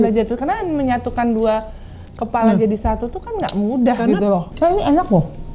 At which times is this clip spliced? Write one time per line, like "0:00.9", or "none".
0:04.5